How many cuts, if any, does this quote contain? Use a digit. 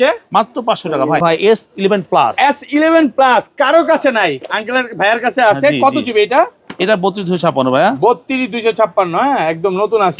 1